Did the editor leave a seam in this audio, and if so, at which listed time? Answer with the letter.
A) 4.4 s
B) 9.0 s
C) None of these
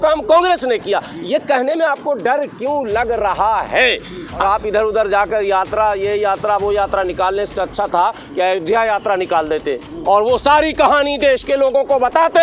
A